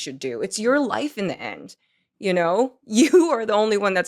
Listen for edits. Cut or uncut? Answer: uncut